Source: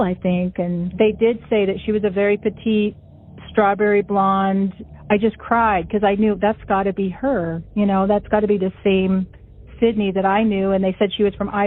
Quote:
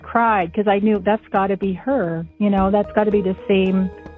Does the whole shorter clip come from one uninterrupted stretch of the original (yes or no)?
yes